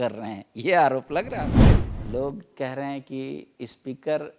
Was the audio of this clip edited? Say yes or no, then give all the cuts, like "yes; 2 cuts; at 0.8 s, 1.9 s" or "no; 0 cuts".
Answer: yes; 1 cut; at 1.7 s